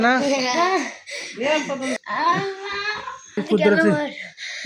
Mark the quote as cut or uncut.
cut